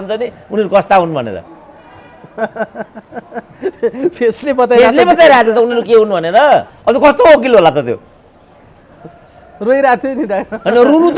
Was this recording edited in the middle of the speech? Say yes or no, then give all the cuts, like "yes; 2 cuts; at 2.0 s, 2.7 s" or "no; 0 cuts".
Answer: yes; 1 cut; at 6.7 s